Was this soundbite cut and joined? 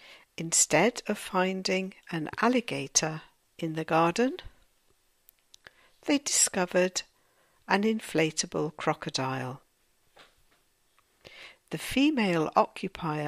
yes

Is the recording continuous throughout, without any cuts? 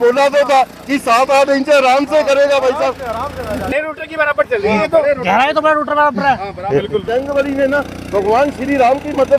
no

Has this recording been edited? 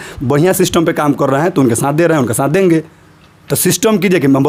no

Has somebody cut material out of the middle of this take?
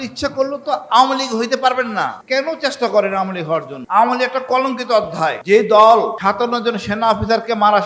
yes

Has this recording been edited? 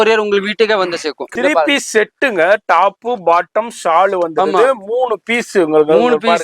yes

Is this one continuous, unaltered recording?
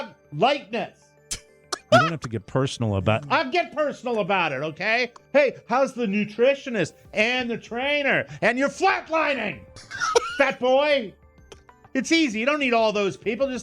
no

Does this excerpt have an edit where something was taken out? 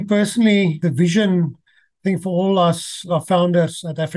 yes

